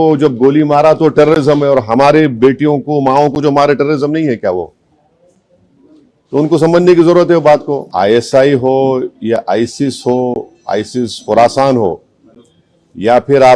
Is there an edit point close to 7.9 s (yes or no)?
yes